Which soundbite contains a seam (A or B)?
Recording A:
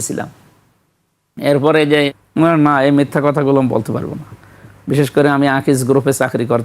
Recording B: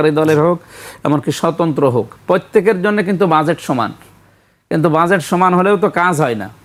A